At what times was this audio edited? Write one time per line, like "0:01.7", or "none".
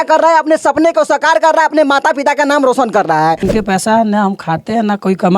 0:03.5